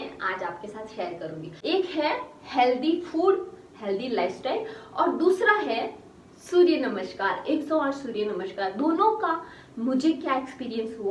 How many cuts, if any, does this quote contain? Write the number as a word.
one